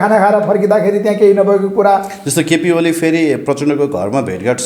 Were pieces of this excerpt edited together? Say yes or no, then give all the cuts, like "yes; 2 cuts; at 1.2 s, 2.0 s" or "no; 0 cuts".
no; 0 cuts